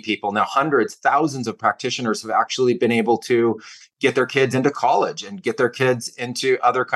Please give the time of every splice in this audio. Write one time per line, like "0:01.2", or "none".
none